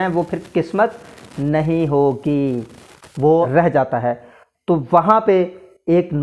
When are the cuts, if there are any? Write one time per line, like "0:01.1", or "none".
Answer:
0:03.5